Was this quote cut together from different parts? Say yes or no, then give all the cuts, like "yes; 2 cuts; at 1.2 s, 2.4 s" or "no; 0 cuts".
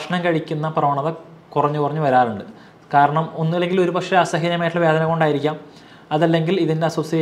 no; 0 cuts